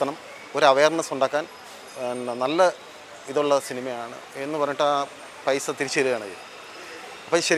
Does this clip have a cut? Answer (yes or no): no